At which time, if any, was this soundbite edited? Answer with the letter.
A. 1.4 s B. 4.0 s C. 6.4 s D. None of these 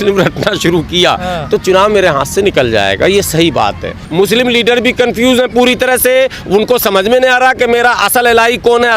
B